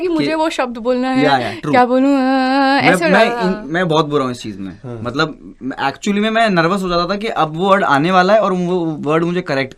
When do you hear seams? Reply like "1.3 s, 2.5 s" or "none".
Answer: none